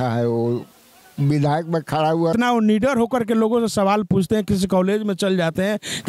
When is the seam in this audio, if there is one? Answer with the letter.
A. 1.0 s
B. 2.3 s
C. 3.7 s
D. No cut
B